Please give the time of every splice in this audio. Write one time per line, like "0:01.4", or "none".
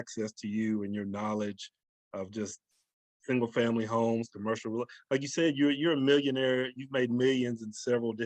none